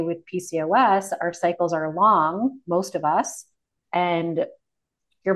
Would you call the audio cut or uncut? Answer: uncut